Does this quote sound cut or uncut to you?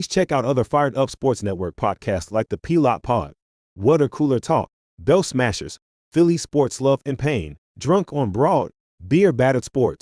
uncut